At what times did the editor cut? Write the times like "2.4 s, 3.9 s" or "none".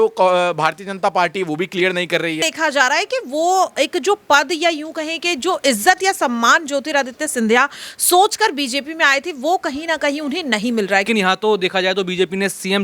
2.4 s, 11.1 s